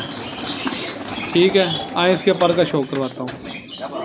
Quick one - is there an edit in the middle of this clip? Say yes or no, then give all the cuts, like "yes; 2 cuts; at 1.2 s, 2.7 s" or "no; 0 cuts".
no; 0 cuts